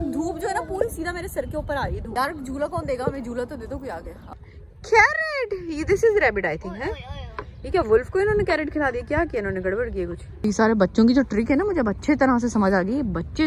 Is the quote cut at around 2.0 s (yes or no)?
yes